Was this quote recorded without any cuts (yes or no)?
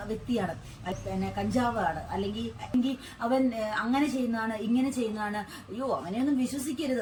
yes